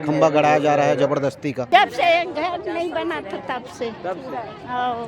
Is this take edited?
yes; 1 cut; at 1.7 s

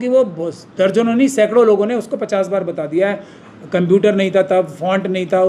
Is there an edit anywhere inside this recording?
no; 0 cuts

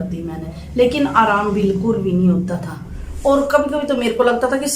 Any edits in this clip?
yes; 1 cut; at 2.8 s

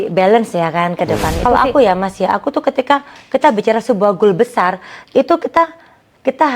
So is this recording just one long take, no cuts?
no; 1 cut; at 1.3 s

